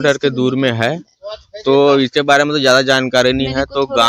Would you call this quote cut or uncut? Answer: uncut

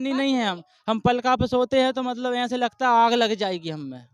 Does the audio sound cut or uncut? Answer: uncut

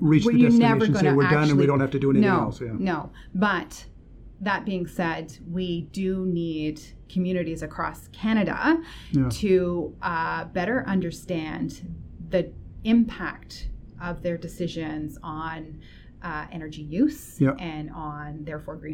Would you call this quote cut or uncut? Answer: uncut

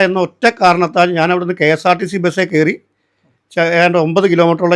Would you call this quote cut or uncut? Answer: uncut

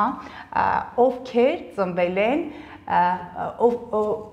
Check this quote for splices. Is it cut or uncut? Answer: uncut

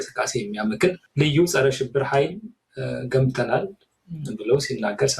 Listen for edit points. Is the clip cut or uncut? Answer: cut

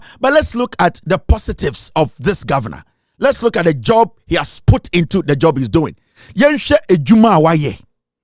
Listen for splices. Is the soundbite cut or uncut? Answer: uncut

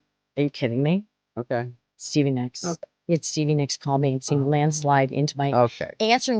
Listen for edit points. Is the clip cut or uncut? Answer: uncut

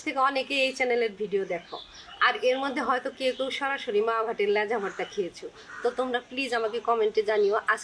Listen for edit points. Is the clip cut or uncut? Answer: uncut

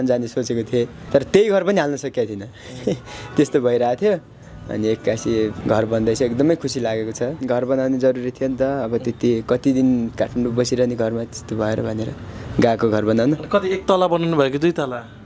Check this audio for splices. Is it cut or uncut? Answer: cut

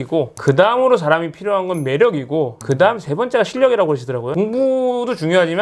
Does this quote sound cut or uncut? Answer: uncut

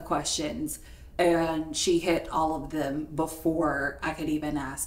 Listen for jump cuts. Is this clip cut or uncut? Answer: uncut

